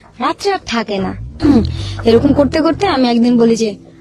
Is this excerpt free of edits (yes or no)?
no